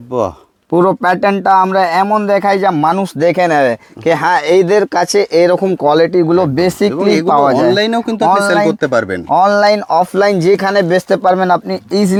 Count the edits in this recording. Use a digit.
0